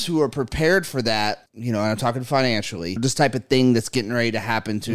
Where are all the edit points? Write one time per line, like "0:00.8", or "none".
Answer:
0:01.5
0:03.0